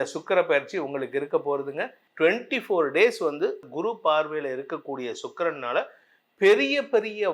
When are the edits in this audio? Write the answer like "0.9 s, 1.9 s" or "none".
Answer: 2.0 s, 3.7 s